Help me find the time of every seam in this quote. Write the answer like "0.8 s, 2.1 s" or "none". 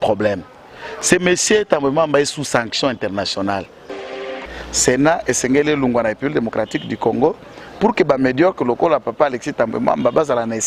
4.2 s